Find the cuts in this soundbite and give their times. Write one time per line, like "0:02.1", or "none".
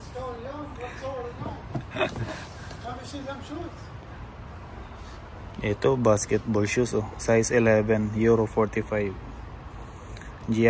0:04.2

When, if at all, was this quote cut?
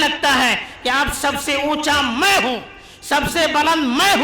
none

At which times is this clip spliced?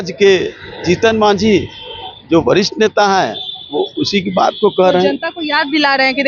none

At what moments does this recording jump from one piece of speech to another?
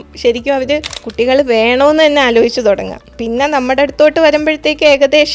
none

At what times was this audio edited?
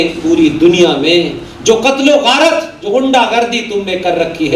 none

